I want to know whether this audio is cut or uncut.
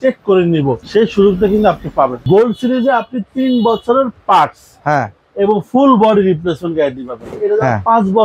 cut